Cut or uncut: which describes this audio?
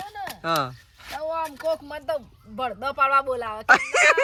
uncut